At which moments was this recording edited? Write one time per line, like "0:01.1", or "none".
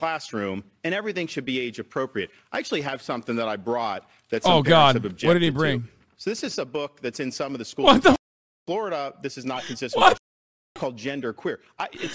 none